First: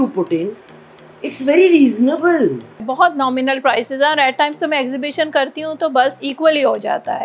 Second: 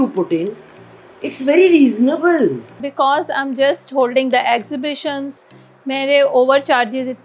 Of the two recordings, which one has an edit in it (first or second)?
first